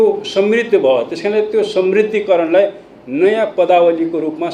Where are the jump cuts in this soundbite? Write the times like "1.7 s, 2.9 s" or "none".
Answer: none

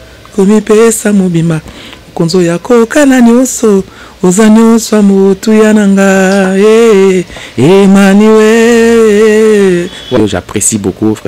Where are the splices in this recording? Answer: 10.2 s

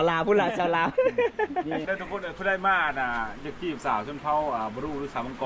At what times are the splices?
1.9 s

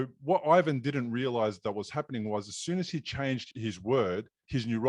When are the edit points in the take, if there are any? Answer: 3.5 s

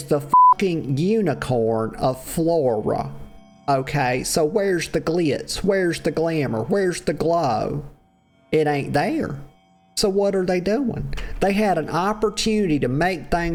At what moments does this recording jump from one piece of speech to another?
none

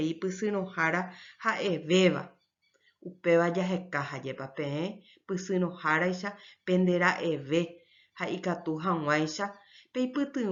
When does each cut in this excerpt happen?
none

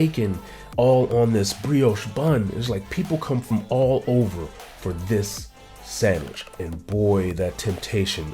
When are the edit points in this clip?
6.6 s

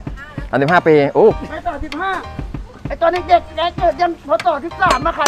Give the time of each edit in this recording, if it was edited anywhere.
1.3 s

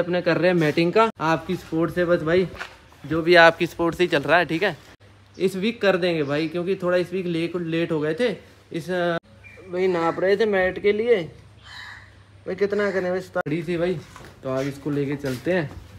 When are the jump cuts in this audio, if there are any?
1.2 s, 4.9 s, 9.2 s, 13.4 s

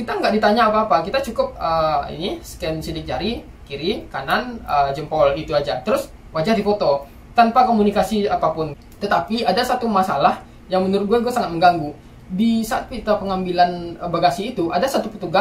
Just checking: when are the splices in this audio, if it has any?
8.8 s

